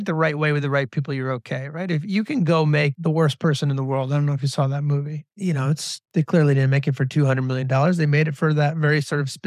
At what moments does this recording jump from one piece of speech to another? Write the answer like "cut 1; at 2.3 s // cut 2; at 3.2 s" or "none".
cut 1; at 2.9 s // cut 2; at 5.9 s